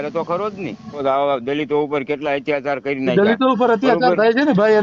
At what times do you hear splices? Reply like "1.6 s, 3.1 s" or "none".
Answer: 1.0 s